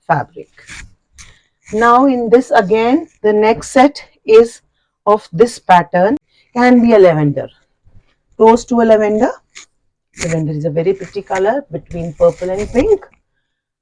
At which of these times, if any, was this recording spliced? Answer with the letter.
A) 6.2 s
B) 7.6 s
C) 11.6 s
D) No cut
A